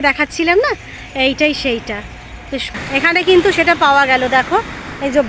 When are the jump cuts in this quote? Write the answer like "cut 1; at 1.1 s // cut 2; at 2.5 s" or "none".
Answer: cut 1; at 2.7 s

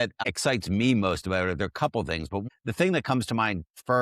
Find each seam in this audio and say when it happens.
cut 1; at 2.4 s

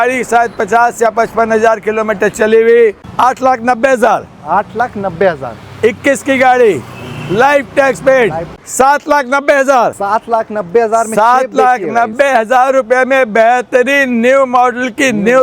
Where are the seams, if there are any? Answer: cut 1; at 3.1 s // cut 2; at 8.5 s

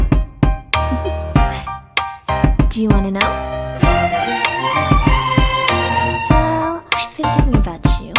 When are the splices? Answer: cut 1; at 3.2 s // cut 2; at 6.3 s

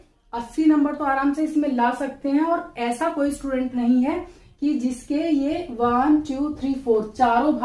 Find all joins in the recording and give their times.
none

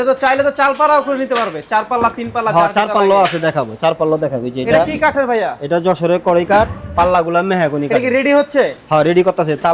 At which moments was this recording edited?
none

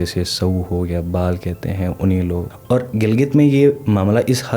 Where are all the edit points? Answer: cut 1; at 2.5 s

